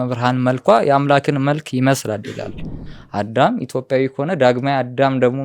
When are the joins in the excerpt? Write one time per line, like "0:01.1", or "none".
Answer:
0:02.9